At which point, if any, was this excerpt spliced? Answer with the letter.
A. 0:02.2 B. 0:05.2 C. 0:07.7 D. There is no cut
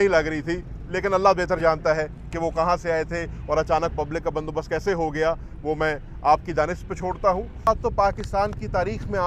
C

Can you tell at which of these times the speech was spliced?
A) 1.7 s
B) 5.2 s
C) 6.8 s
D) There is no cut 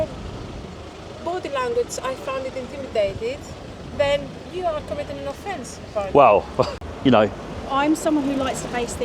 C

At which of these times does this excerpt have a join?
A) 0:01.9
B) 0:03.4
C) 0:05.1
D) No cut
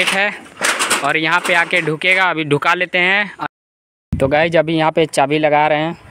B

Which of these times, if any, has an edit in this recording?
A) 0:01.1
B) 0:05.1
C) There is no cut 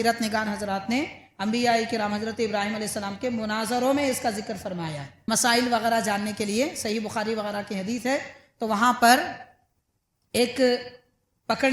B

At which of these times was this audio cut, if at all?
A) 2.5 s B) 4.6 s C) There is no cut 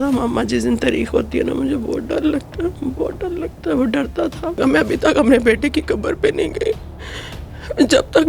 B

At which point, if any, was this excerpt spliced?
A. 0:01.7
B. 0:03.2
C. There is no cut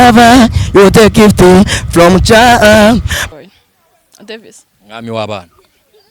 B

